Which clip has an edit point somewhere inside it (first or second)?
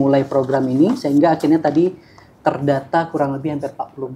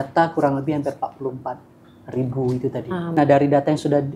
second